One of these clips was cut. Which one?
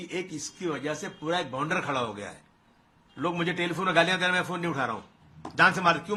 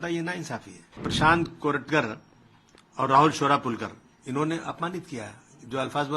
second; 1 cut; at 1.1 s

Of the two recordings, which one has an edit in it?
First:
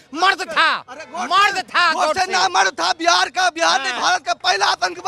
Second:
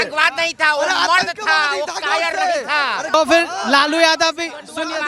second; 1 cut; at 3.1 s

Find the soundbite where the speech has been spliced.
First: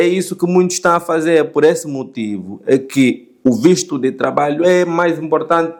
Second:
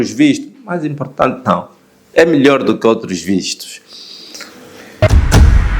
second; 1 cut; at 4.9 s

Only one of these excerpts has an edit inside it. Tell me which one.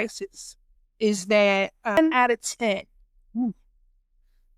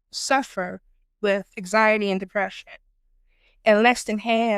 first; 1 cut; at 2.0 s

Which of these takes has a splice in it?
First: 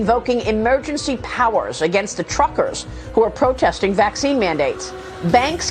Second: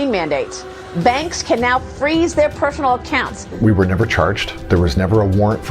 second; 2 cuts; at 3.4 s, 4.5 s

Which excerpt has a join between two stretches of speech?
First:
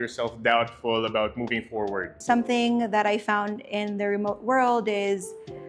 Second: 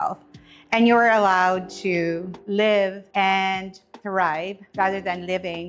first; 1 cut; at 2.2 s

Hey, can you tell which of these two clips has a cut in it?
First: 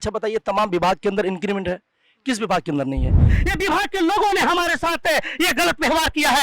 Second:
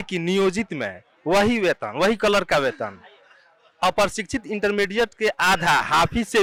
first; 1 cut; at 3.4 s

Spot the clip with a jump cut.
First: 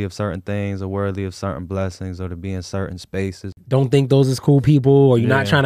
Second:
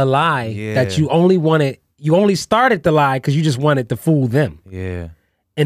first; 1 cut; at 3.6 s

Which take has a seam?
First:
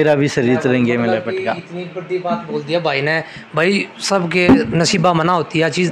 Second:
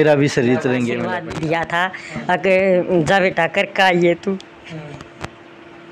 second; 1 cut; at 1.2 s

